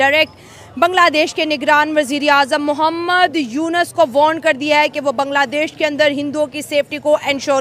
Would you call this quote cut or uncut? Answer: uncut